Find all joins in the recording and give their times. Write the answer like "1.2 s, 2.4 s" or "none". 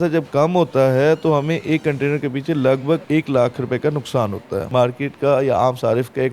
3.0 s, 4.7 s

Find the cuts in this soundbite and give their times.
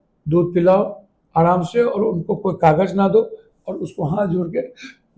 none

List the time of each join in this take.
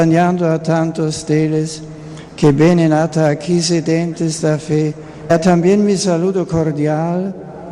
none

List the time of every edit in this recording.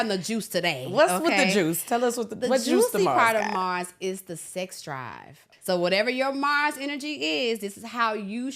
5.5 s

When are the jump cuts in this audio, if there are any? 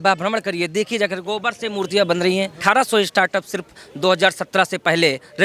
2.6 s

